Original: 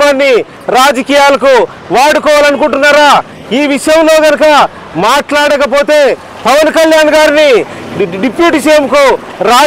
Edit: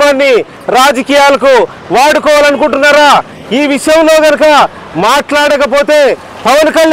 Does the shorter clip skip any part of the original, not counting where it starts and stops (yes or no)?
no